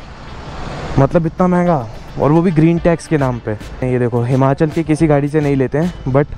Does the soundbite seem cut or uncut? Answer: cut